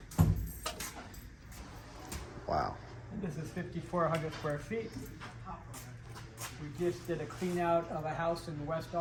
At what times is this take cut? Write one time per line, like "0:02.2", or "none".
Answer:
none